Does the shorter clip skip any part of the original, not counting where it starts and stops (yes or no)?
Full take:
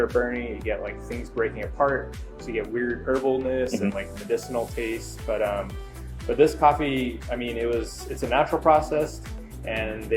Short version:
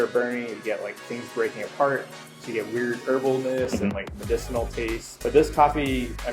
yes